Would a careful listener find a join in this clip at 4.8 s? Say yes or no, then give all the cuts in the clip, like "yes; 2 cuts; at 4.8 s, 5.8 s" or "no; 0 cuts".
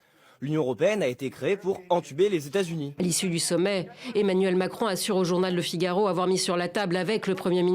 no; 1 cut; at 2.9 s